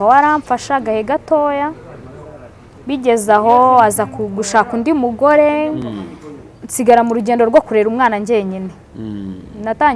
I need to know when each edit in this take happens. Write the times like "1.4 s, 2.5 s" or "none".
none